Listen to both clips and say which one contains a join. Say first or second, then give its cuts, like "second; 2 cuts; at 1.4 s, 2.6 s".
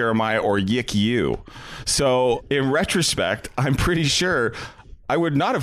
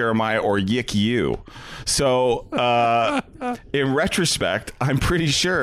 first; 1 cut; at 2.4 s